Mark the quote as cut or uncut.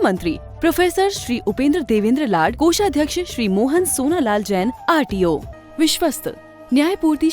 cut